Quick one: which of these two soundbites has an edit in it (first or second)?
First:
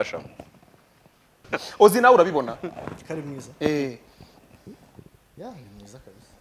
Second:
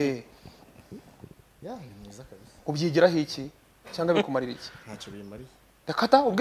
first